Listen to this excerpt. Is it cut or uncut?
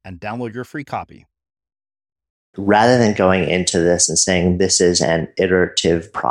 cut